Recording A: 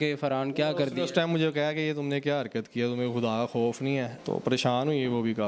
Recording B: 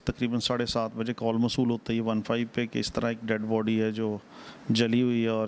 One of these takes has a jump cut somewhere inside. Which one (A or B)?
A